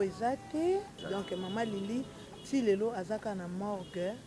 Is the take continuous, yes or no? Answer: no